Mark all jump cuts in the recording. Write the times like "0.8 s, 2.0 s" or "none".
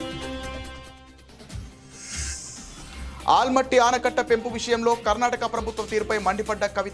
none

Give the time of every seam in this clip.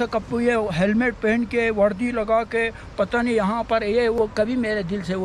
4.2 s

